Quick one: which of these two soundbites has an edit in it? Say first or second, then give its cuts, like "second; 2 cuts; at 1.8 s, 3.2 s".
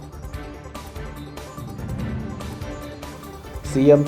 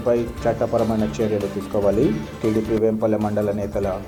first; 1 cut; at 2.2 s